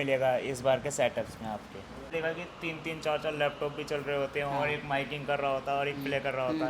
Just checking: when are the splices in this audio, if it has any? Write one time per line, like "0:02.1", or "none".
0:02.1